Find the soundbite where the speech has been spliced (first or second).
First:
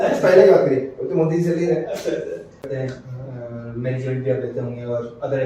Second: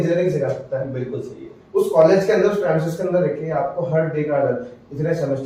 first